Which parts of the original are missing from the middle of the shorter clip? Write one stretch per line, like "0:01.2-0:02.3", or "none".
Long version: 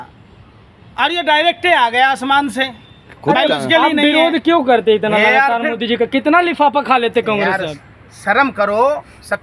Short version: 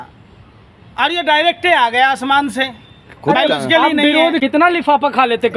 0:04.5-0:06.2